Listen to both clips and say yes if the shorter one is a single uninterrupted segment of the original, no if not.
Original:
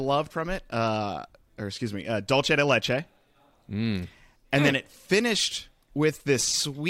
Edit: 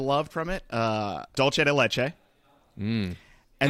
no